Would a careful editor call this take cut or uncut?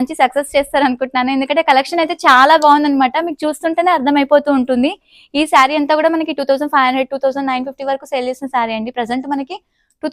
uncut